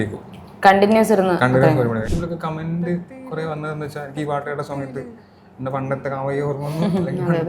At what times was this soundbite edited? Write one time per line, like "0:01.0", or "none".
0:02.1